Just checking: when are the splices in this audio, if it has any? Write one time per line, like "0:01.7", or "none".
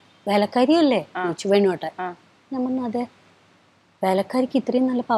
none